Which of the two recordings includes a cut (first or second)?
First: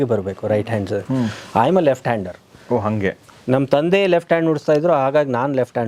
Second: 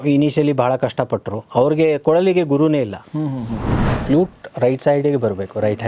second